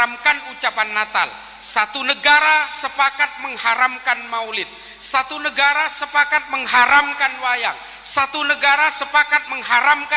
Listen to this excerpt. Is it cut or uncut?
uncut